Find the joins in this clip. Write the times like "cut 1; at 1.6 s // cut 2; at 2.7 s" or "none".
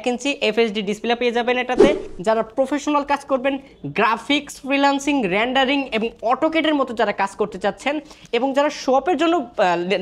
cut 1; at 2.1 s

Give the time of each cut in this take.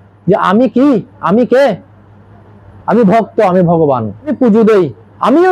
cut 1; at 4.3 s

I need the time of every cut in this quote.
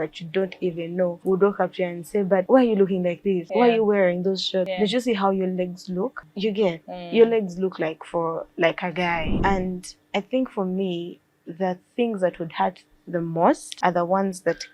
cut 1; at 1.2 s // cut 2; at 2.5 s // cut 3; at 3.4 s // cut 4; at 4.7 s // cut 5; at 6.2 s // cut 6; at 9.3 s // cut 7; at 13.7 s

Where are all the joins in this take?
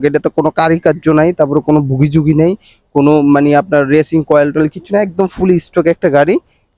none

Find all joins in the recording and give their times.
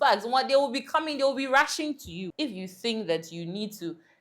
cut 1; at 2.2 s

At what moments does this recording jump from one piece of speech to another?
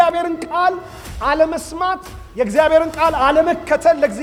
none

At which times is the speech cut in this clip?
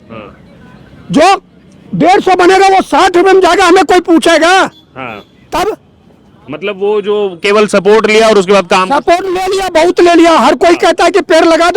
none

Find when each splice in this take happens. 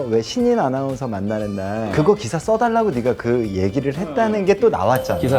cut 1; at 1.9 s

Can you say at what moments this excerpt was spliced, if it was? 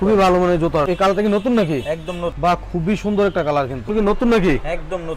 cut 1; at 0.9 s // cut 2; at 3.9 s

